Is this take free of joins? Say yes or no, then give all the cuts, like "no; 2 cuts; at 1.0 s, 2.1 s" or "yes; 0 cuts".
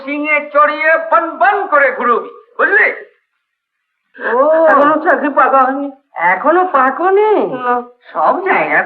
no; 1 cut; at 4.0 s